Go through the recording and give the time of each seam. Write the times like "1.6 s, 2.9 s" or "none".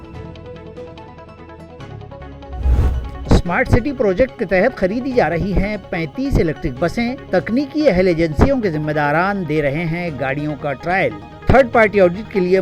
3.1 s